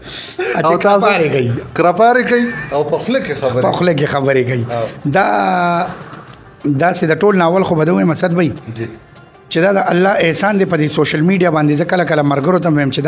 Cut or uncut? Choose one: uncut